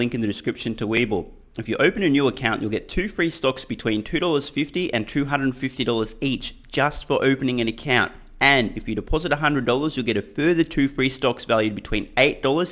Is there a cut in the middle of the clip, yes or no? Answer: no